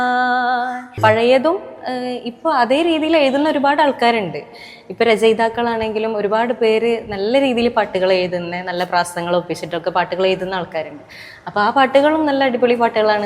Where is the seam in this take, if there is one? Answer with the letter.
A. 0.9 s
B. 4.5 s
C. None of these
A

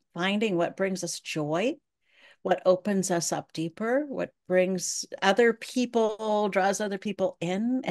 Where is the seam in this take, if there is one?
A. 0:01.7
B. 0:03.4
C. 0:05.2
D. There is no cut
D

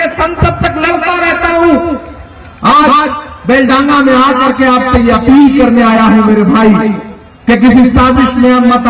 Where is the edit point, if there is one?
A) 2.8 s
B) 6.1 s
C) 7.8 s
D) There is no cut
D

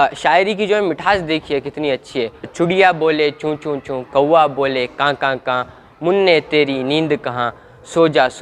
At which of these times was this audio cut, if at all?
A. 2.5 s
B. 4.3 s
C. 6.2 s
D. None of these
A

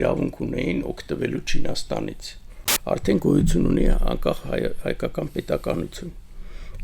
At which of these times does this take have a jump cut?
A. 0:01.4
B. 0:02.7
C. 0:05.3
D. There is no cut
B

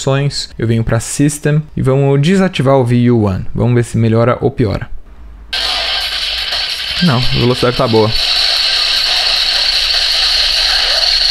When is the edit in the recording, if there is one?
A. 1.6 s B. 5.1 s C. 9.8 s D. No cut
B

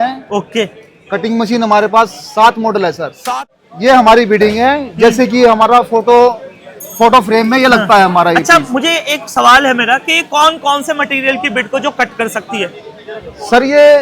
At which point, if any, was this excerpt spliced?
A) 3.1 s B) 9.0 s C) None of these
A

